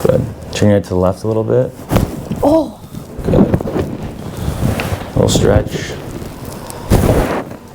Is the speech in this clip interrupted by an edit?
no; 0 cuts

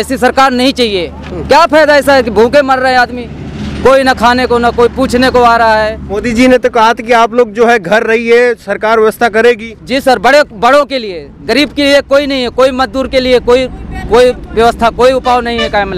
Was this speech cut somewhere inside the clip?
yes; 1 cut; at 6.1 s

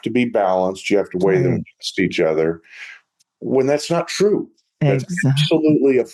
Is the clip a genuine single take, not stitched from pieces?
yes; 0 cuts

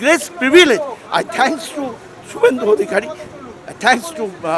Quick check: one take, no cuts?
yes; 0 cuts

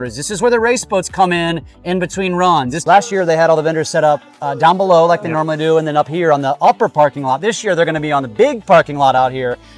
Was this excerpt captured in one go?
no; 1 cut; at 2.8 s

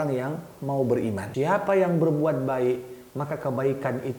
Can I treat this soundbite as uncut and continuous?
no; 1 cut; at 1.3 s

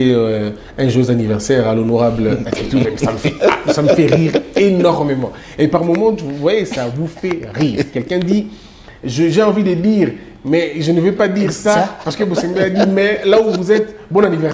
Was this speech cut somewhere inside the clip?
no; 0 cuts

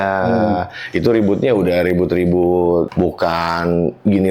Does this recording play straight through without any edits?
no; 1 cut; at 2.9 s

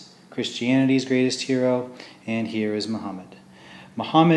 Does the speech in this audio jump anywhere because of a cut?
yes; 1 cut; at 1.6 s

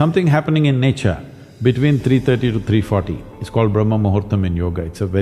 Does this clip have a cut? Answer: no; 0 cuts

